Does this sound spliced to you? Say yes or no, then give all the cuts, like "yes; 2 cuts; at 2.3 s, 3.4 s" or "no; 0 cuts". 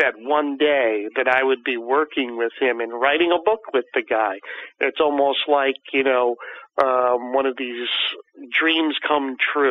no; 0 cuts